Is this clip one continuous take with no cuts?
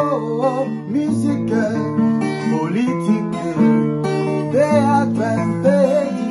yes; 0 cuts

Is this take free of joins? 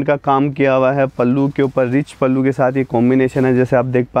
yes; 0 cuts

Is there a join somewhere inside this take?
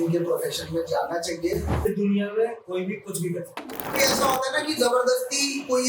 yes; 2 cuts; at 1.8 s, 4.0 s

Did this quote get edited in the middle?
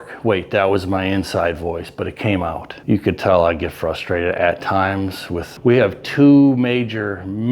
yes; 2 cuts; at 2.7 s, 5.4 s

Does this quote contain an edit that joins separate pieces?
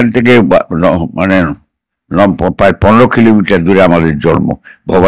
no; 0 cuts

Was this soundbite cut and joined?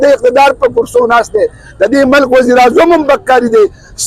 no; 0 cuts

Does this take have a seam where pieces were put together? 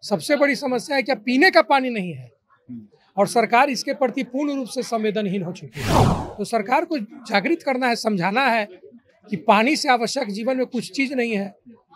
no; 0 cuts

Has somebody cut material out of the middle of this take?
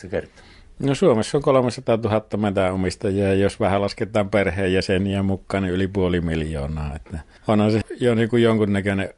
yes; 1 cut; at 7.8 s

